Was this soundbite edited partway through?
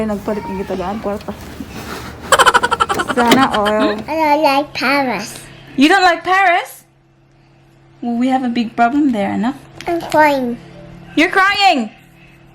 yes; 1 cut; at 4.0 s

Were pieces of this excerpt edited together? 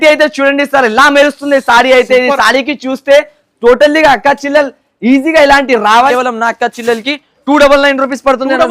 yes; 1 cut; at 6.1 s

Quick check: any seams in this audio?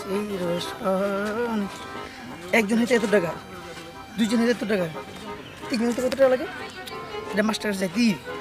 no; 0 cuts

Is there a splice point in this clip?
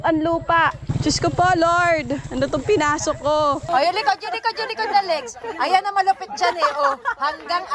yes; 1 cut; at 3.6 s

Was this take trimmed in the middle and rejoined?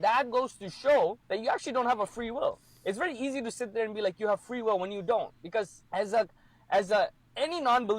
yes; 2 cuts; at 1.2 s, 5.8 s

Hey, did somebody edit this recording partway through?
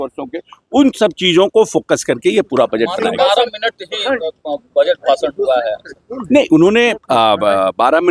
no; 0 cuts

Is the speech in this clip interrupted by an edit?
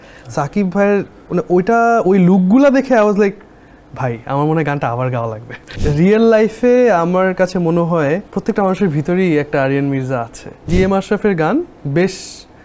yes; 3 cuts; at 5.8 s, 8.3 s, 10.7 s

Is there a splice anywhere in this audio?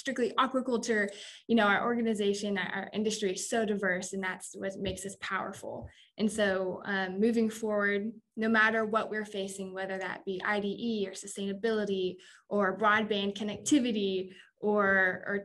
no; 0 cuts

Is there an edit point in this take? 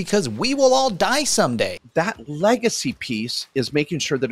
yes; 1 cut; at 1.8 s

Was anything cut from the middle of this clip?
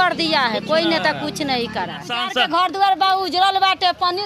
yes; 1 cut; at 2.3 s

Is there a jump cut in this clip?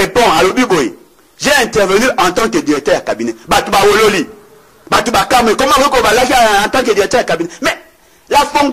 no; 0 cuts

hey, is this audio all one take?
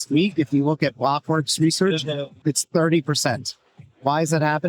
no; 1 cut; at 2.3 s

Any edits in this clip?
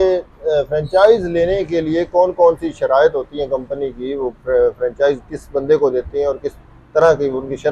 no; 0 cuts

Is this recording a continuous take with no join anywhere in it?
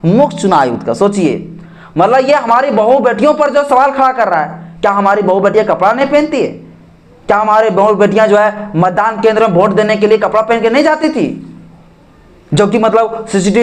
yes; 0 cuts

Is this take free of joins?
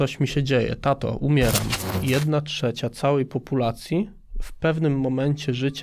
no; 1 cut; at 1.9 s

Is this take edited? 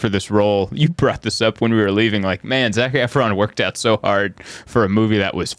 no; 0 cuts

